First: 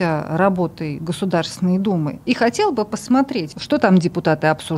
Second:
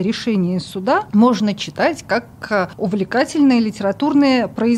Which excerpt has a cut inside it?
first; 2 cuts; at 2.2 s, 3.5 s

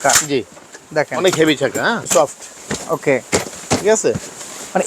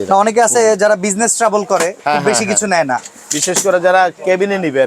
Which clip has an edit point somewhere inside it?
first; 1 cut; at 2.0 s

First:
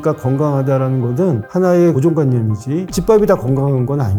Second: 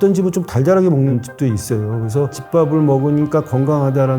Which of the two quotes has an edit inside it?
second; 1 cut; at 2.3 s

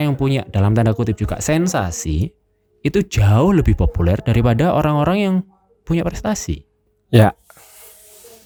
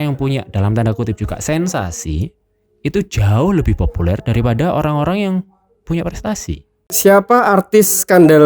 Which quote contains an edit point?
second; 1 cut; at 6.9 s

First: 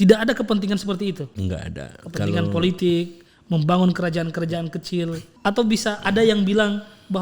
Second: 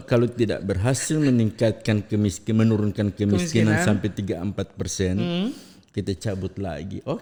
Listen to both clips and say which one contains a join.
first; 2 cuts; at 1.3 s, 5.2 s

